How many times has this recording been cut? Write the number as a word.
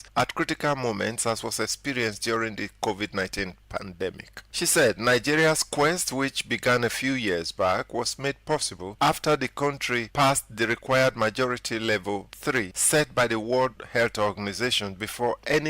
four